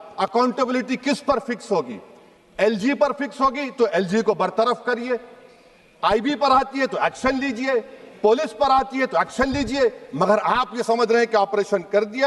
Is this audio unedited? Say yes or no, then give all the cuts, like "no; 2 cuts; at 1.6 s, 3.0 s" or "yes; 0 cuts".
yes; 0 cuts